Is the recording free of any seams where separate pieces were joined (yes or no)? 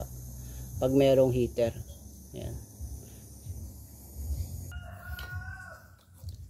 no